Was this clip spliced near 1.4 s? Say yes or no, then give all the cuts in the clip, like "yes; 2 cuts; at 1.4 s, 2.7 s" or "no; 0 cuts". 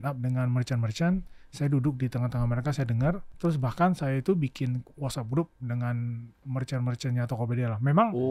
no; 2 cuts; at 3.3 s, 6.3 s